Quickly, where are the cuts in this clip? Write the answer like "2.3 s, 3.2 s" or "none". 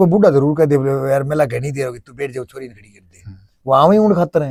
none